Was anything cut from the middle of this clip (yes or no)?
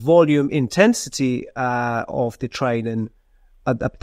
no